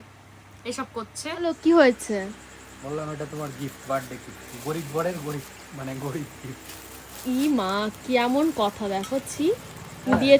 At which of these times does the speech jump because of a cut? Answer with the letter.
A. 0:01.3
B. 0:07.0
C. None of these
A